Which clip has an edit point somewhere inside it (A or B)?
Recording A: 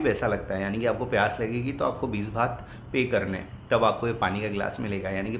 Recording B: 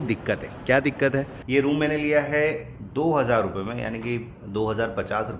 B